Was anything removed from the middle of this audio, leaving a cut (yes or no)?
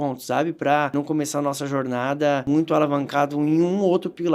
yes